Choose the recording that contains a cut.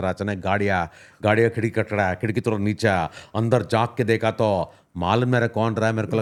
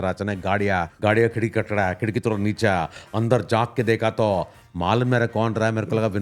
second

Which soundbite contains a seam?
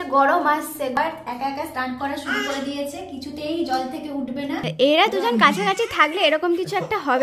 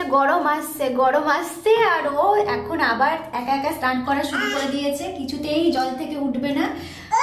first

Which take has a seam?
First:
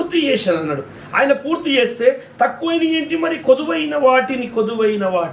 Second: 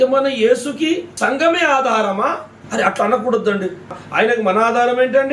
second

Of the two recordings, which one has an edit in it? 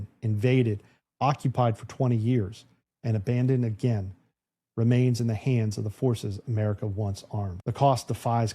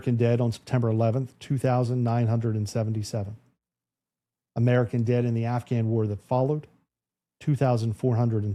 first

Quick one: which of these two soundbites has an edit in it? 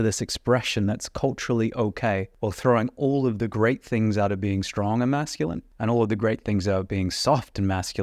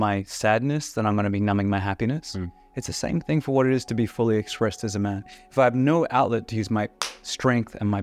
first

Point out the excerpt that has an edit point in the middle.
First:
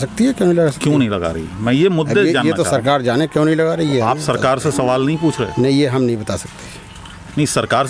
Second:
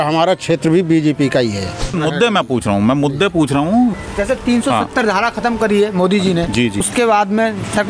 second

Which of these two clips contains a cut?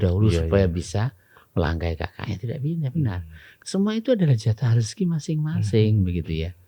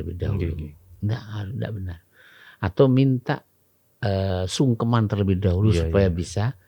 first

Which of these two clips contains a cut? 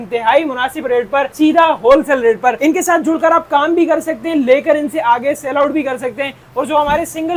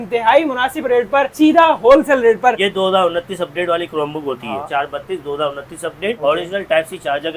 second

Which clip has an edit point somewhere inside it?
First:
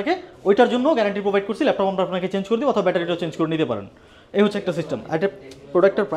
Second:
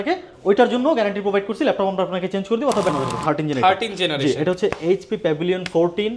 second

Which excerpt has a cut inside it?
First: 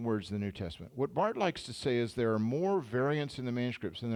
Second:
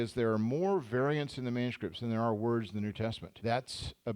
second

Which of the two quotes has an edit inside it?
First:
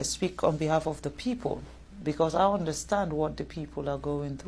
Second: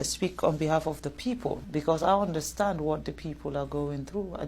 second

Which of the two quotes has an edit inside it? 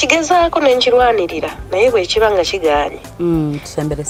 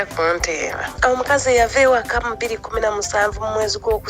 second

